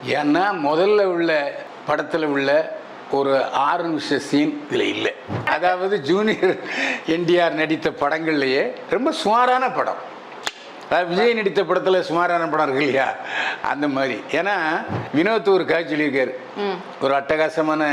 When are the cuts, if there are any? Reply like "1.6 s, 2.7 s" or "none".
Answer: 1.7 s, 5.5 s, 15.0 s